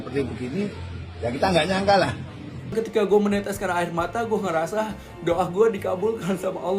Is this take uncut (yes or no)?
no